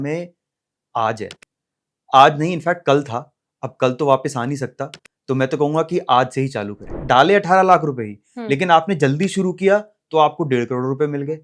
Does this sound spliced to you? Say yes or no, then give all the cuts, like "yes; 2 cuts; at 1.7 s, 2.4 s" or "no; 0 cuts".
yes; 1 cut; at 6.9 s